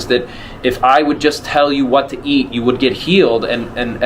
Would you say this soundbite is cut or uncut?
uncut